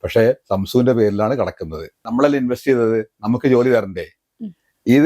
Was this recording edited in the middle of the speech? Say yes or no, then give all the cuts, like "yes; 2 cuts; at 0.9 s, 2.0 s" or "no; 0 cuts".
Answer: yes; 1 cut; at 2.1 s